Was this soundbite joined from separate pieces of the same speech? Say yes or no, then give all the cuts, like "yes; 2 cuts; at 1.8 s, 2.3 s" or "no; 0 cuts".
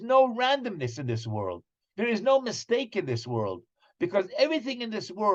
no; 0 cuts